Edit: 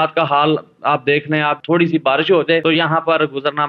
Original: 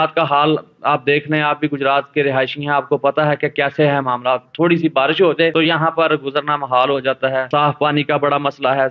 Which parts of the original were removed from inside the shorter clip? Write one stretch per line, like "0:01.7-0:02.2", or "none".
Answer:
0:01.6-0:04.5